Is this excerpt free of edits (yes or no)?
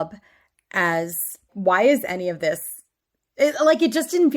no